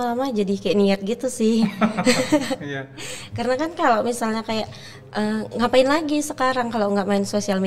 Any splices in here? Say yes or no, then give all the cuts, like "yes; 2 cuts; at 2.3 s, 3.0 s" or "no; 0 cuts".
no; 0 cuts